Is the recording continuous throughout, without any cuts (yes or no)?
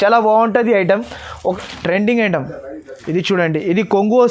no